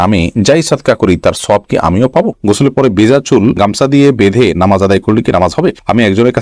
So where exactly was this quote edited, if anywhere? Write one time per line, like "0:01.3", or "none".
0:02.4